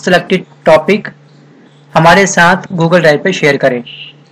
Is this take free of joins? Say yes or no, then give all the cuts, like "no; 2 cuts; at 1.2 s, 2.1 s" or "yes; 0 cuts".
no; 1 cut; at 2.6 s